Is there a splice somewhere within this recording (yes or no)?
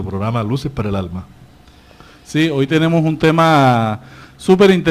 yes